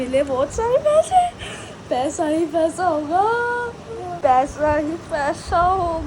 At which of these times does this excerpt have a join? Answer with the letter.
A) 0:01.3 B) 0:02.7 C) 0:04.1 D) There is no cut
C